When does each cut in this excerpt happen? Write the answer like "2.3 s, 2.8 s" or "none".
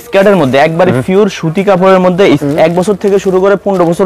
2.4 s